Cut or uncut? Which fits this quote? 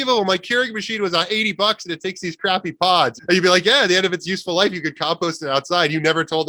uncut